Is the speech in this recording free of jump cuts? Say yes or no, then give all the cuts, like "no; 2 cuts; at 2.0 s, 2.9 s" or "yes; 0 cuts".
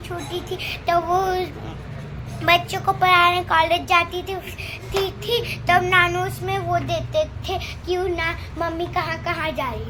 yes; 0 cuts